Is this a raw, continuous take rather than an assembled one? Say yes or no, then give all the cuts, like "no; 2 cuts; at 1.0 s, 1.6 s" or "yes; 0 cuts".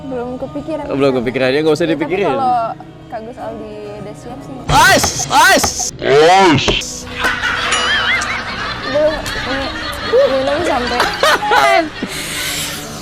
yes; 0 cuts